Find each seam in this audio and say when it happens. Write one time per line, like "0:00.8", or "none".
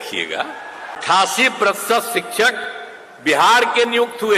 0:01.0